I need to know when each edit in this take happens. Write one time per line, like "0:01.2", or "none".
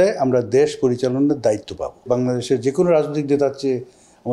0:02.0

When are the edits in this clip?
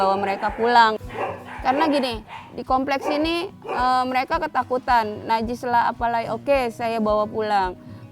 0:01.0

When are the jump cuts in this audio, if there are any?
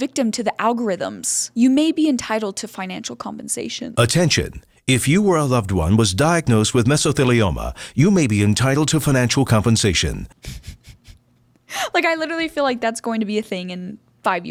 none

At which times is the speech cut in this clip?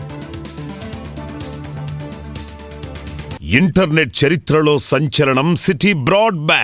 0:03.4

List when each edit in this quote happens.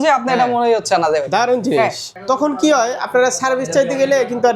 0:02.1

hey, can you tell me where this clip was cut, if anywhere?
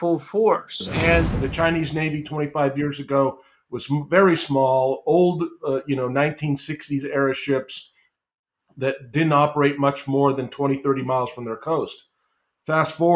0:01.3

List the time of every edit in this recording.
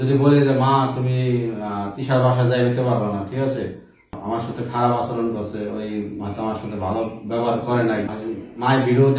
0:04.1
0:08.1

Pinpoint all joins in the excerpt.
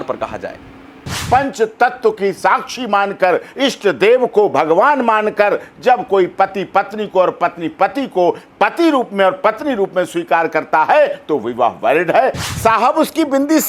0:01.2
0:12.4

